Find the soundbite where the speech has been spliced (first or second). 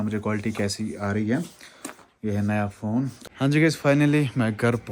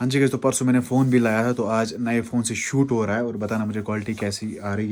first